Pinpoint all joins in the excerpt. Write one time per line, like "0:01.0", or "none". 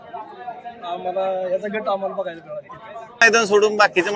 0:03.2